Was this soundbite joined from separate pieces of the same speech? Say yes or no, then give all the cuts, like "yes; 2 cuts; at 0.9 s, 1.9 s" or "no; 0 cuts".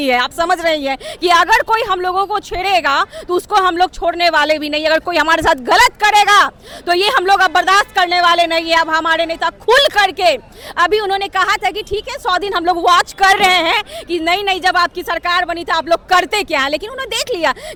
no; 0 cuts